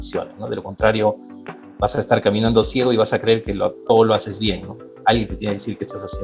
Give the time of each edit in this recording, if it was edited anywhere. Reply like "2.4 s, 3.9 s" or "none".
none